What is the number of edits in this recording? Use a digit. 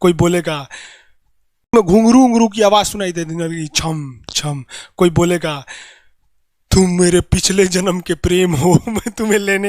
1